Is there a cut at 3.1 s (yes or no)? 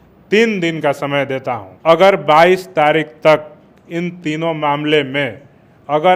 no